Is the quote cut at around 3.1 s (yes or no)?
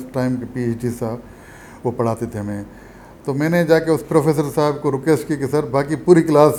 no